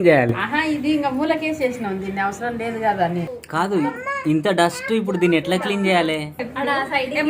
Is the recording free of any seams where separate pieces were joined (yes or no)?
no